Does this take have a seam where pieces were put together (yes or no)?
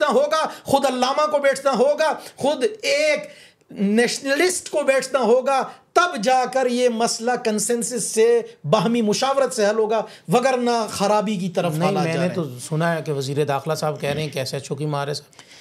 no